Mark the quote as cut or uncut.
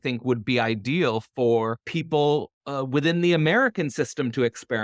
cut